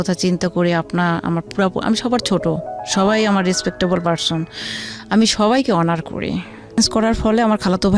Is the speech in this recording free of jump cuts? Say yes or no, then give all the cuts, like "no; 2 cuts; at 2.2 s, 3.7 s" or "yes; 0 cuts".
no; 1 cut; at 6.8 s